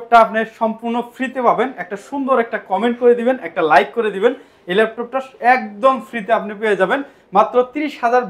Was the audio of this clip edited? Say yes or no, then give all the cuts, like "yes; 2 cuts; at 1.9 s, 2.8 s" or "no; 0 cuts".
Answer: no; 0 cuts